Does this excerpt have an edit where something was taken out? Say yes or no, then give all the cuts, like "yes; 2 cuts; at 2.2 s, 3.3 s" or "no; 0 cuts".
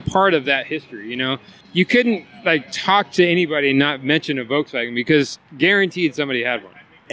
no; 0 cuts